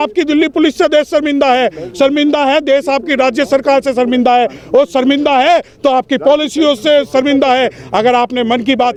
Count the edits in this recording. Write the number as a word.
zero